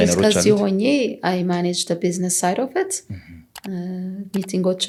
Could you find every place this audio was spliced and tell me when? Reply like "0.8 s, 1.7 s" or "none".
none